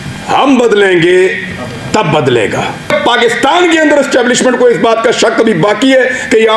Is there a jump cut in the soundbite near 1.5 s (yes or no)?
no